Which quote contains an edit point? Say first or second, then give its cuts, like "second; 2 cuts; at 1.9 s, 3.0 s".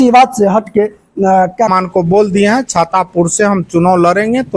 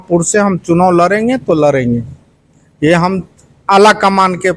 first; 1 cut; at 1.7 s